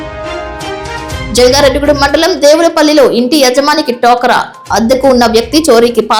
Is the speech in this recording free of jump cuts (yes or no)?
yes